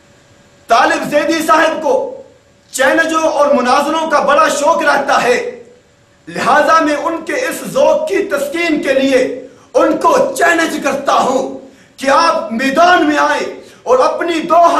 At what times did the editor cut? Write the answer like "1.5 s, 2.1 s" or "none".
1.4 s